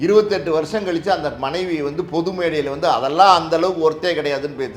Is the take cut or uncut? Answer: uncut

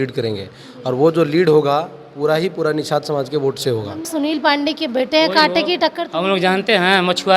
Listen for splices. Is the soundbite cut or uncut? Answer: cut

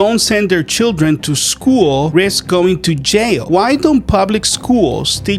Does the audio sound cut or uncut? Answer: cut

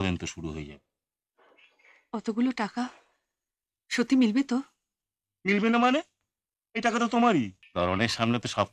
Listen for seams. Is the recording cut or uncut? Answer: cut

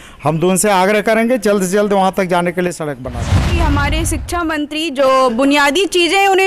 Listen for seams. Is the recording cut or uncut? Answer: cut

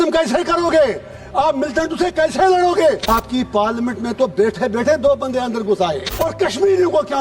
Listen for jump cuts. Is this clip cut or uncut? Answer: cut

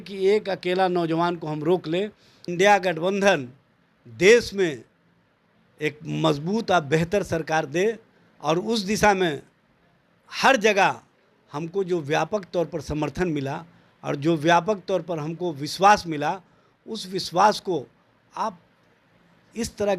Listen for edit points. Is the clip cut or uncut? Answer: cut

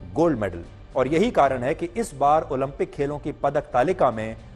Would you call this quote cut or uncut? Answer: uncut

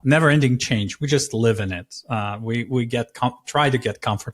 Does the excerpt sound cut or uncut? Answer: uncut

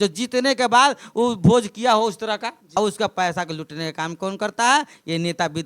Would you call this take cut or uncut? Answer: cut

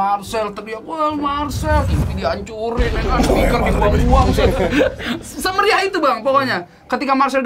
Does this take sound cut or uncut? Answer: uncut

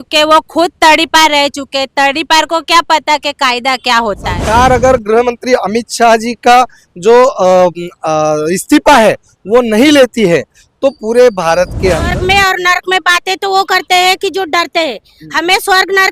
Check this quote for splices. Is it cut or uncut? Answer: cut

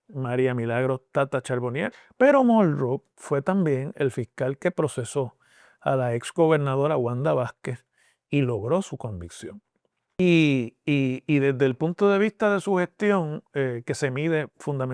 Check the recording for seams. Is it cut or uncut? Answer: cut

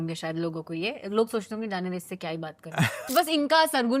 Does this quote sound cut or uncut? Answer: cut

